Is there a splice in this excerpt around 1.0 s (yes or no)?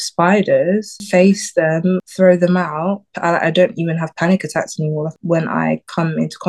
yes